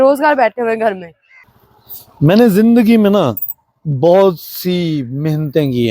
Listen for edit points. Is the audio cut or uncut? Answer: cut